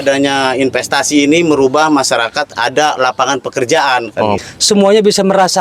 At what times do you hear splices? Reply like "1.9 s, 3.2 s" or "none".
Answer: 4.4 s